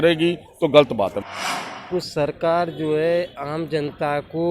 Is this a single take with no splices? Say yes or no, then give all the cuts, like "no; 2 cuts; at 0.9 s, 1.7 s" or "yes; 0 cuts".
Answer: no; 1 cut; at 1.2 s